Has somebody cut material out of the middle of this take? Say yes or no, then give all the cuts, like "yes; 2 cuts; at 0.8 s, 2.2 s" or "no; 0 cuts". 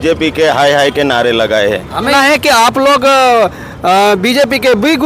yes; 1 cut; at 2.1 s